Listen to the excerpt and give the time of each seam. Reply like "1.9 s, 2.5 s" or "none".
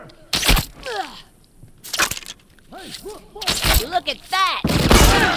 none